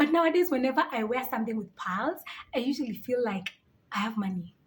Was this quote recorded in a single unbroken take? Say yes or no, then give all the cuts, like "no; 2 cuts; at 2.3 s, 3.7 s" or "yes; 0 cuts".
yes; 0 cuts